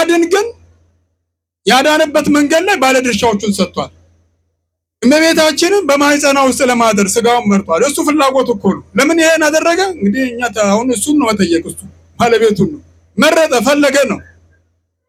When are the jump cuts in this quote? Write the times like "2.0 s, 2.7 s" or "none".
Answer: none